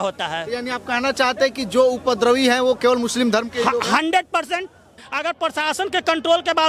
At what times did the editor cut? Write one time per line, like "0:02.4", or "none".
0:05.0

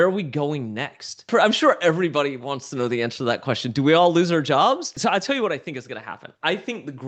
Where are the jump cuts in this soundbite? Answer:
0:01.3
0:05.0

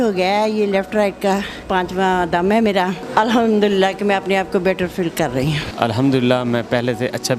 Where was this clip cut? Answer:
0:01.6
0:03.0
0:05.7

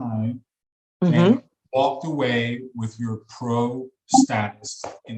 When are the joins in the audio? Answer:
none

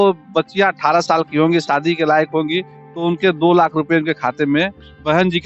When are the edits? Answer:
none

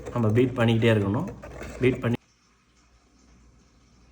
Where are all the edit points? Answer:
0:02.1

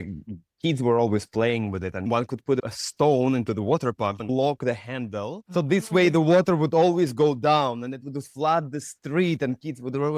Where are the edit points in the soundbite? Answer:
0:05.4

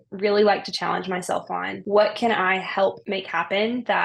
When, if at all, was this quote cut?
0:01.7
0:03.0

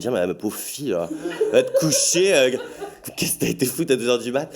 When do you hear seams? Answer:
none

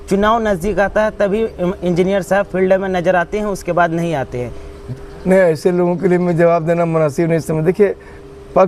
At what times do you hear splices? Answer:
none

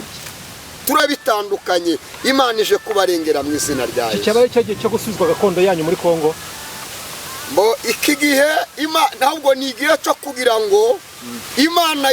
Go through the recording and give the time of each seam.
0:01.0

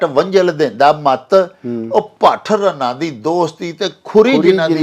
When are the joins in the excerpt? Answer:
none

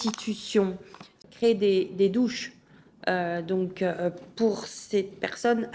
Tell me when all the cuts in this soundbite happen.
0:01.2

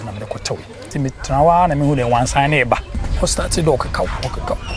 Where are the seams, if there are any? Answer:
0:00.9
0:03.0

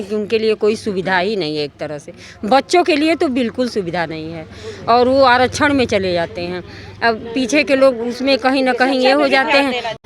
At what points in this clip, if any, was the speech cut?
none

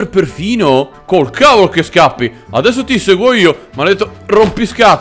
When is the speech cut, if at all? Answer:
0:01.0

